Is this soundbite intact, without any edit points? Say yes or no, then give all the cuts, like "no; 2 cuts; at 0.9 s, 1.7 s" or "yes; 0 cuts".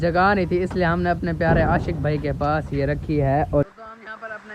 no; 1 cut; at 3.6 s